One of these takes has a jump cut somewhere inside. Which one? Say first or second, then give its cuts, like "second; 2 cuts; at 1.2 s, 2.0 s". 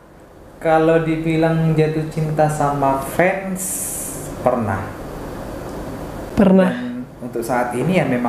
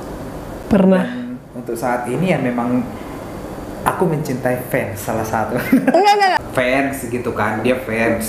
second; 1 cut; at 6.4 s